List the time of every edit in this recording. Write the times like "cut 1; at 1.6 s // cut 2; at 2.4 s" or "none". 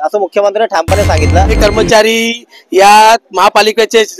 cut 1; at 1.6 s